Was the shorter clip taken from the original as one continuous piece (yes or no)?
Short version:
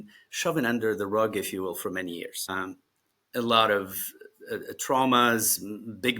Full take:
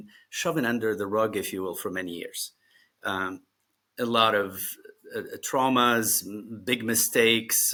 no